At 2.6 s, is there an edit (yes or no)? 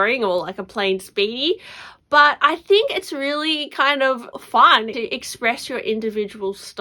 no